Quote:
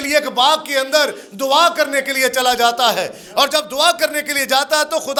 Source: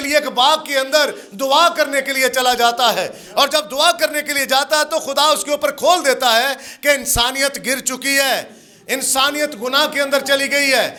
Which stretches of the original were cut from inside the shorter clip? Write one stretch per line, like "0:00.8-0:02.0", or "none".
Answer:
none